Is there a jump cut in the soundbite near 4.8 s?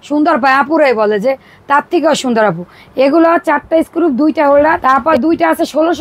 yes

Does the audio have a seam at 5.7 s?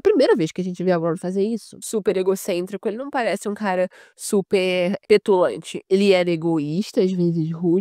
yes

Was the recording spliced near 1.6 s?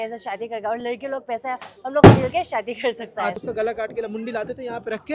no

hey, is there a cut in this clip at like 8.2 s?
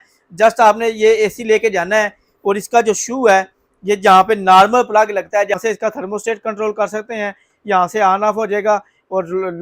no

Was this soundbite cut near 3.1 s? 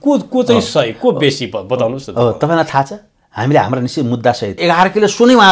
no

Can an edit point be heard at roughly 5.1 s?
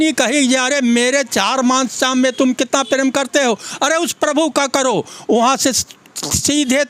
no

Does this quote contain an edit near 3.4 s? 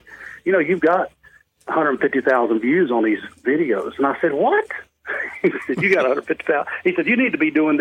no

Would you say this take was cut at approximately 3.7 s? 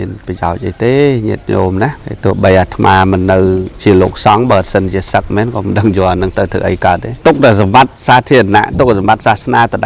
yes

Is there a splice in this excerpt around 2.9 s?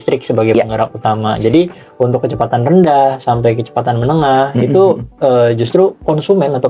no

